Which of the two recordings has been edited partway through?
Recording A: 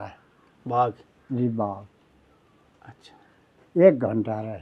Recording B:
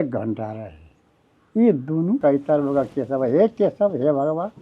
B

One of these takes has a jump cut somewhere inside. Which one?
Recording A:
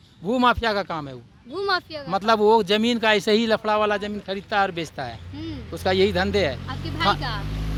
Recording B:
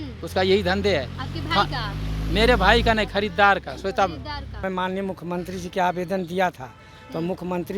B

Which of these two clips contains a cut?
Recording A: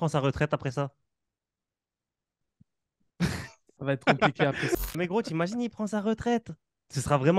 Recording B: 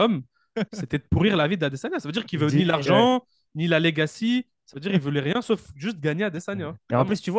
A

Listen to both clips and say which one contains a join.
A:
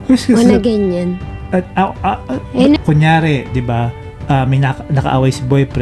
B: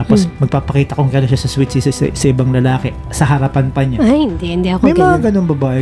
A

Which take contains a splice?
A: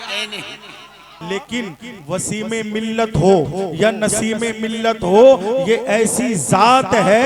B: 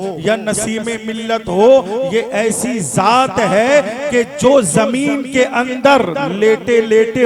A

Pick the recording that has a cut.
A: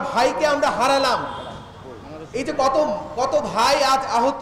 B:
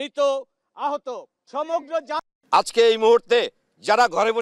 B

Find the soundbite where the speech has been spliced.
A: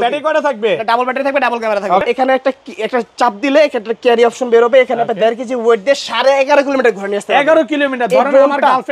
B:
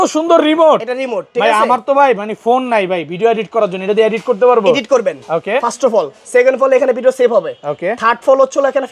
A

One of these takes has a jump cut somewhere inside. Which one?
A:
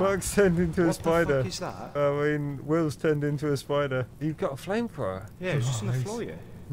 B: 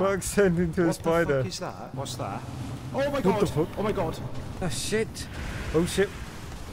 B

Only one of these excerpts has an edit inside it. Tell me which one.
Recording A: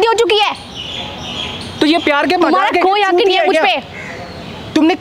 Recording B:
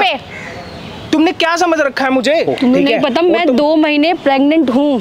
B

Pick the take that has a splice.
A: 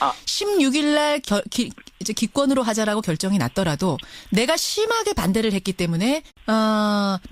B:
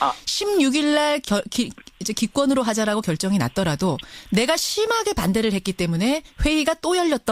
B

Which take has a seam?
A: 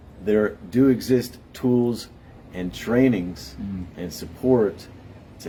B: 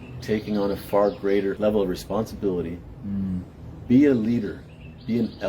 B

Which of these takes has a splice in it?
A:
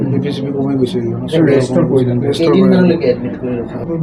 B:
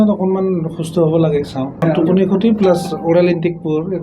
B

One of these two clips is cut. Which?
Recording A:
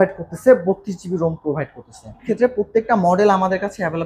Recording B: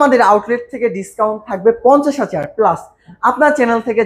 A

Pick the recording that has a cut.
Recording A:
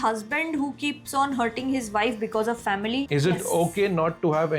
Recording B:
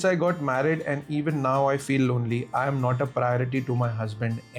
A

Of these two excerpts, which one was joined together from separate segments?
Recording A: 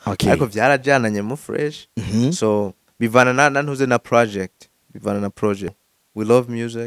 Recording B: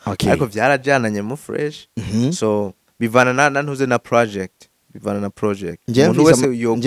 A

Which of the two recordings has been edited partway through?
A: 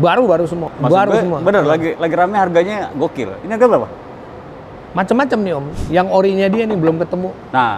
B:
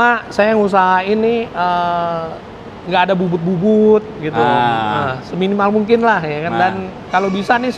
A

